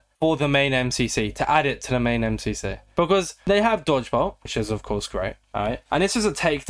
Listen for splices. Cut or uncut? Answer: uncut